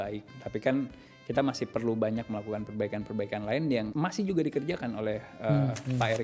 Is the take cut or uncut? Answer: cut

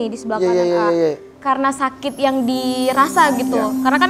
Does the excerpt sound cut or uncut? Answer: cut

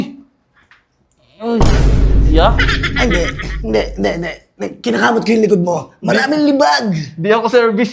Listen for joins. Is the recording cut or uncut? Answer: uncut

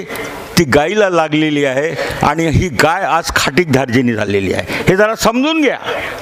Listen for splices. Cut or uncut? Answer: uncut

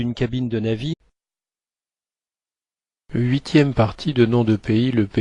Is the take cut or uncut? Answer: uncut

